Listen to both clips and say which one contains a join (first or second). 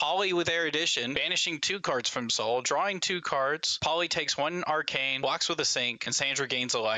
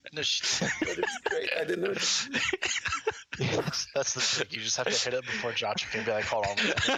first